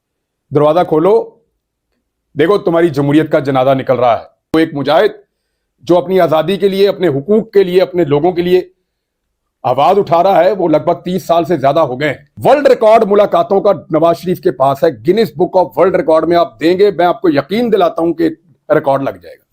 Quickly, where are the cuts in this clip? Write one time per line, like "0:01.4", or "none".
0:04.5
0:12.3